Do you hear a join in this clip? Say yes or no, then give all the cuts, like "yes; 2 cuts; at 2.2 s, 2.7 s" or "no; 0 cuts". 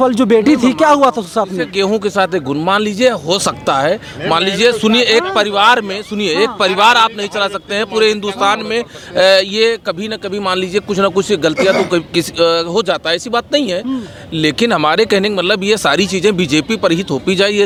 no; 0 cuts